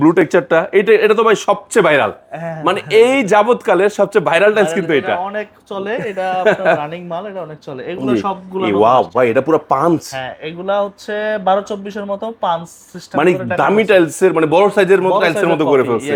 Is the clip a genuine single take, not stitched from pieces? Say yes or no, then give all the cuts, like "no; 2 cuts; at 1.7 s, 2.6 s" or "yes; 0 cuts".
yes; 0 cuts